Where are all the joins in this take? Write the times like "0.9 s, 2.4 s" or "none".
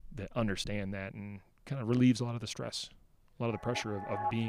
none